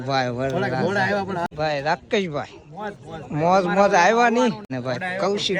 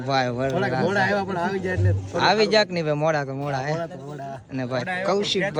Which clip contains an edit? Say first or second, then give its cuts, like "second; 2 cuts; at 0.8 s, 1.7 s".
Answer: first; 2 cuts; at 1.5 s, 4.7 s